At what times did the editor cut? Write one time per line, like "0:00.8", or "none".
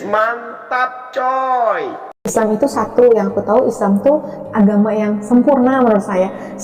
0:02.3